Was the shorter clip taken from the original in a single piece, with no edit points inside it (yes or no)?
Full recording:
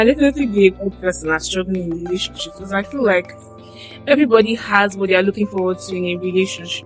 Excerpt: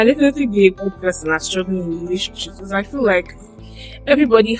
yes